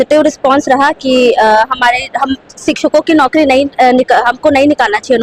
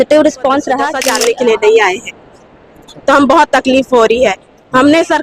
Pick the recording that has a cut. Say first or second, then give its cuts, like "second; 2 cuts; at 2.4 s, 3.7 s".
second; 1 cut; at 1.0 s